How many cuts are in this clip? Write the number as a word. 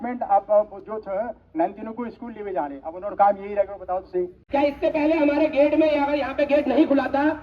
one